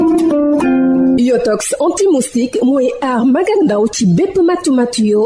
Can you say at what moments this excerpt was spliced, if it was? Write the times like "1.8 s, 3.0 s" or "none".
1.1 s